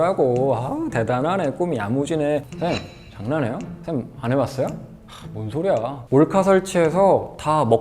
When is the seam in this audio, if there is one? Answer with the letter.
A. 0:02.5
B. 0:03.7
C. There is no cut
A